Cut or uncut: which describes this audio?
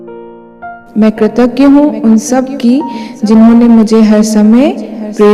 cut